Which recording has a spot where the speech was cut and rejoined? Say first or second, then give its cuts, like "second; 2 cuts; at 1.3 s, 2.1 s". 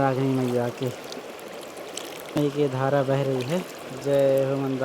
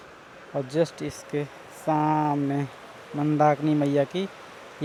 first; 1 cut; at 2.4 s